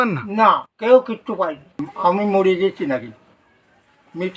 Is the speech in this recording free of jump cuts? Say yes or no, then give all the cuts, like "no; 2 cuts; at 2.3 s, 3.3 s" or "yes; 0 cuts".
no; 1 cut; at 1.9 s